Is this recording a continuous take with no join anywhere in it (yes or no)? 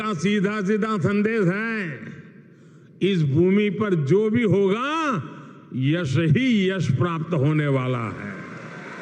yes